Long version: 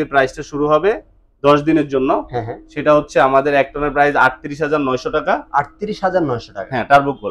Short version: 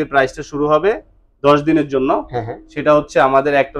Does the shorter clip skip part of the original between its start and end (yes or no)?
no